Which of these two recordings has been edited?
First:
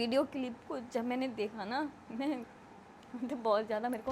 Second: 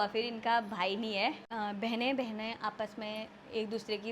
second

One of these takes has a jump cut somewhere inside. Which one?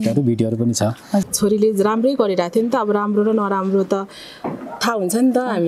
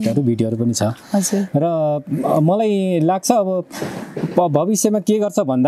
first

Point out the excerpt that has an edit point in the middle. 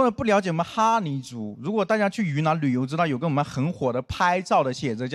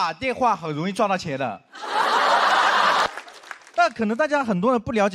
second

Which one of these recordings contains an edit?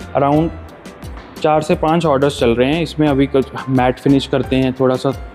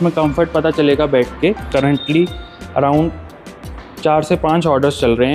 second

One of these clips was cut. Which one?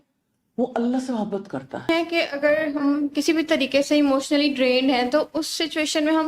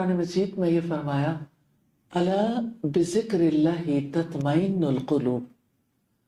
first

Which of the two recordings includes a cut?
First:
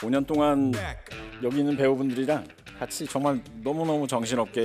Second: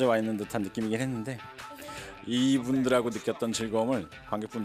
second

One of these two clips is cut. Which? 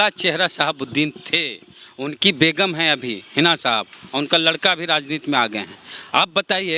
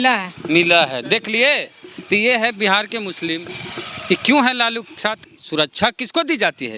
second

